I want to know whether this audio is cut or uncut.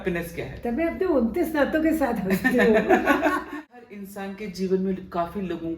cut